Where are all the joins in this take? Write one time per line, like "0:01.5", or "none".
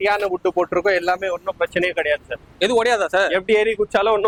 none

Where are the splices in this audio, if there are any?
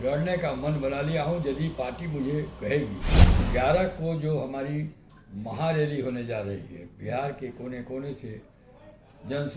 0:03.5

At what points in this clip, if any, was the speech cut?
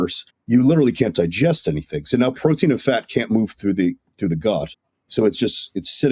none

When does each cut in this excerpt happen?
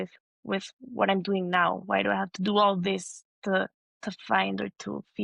0:03.8

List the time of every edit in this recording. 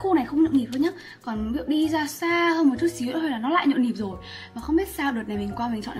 none

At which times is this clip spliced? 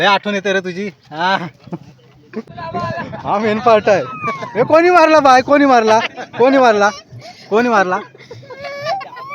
0:02.6

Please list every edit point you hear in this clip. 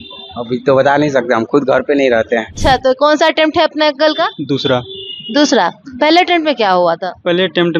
0:02.6

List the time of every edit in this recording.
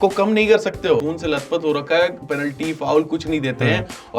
0:01.0

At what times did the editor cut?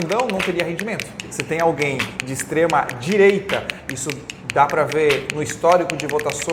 0:01.3

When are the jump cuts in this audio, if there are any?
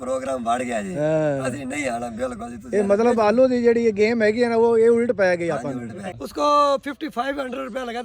0:06.2

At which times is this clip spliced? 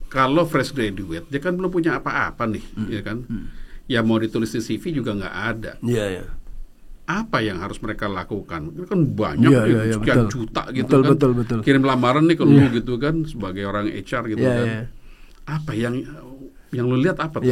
none

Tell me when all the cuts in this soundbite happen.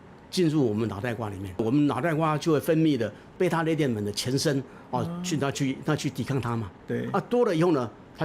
0:01.6
0:03.3

